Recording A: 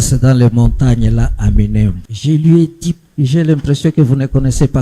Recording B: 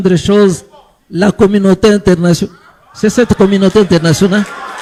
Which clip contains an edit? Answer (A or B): A